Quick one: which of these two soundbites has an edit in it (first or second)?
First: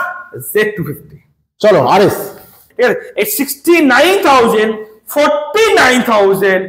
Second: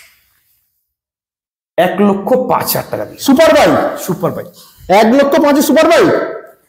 first